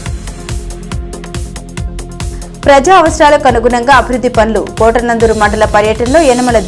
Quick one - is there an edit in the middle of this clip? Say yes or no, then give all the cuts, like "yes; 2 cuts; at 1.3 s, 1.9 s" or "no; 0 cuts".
yes; 1 cut; at 2.3 s